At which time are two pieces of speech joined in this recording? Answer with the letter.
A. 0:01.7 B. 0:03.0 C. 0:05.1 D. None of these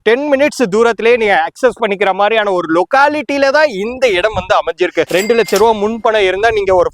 C